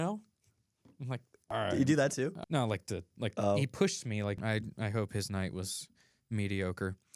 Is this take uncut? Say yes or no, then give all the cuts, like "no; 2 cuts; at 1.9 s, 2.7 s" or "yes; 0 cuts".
no; 3 cuts; at 1.3 s, 2.4 s, 4.4 s